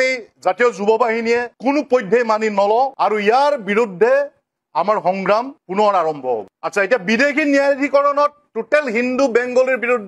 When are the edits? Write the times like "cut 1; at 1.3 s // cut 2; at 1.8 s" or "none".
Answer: cut 1; at 6.5 s